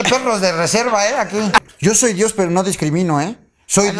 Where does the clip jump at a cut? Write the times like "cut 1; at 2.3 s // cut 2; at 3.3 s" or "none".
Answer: cut 1; at 1.7 s

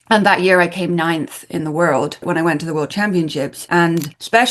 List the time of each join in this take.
cut 1; at 2.2 s // cut 2; at 3.6 s

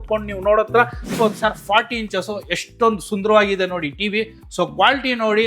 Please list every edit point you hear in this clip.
cut 1; at 1.1 s

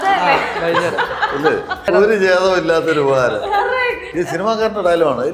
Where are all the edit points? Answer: cut 1; at 1.9 s

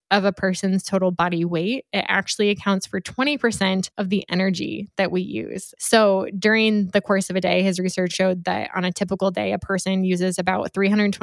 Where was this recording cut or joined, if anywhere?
cut 1; at 5.6 s // cut 2; at 8.1 s

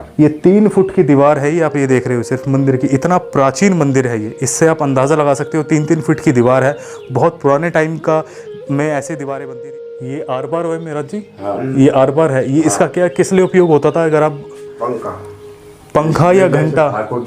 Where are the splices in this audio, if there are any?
cut 1; at 9.5 s

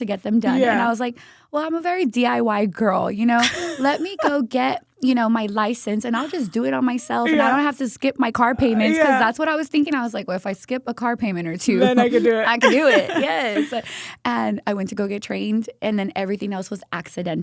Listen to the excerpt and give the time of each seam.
none

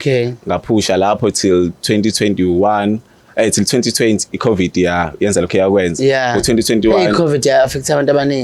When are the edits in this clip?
none

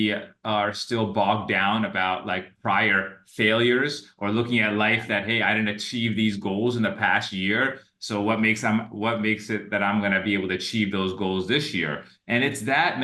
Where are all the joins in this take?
none

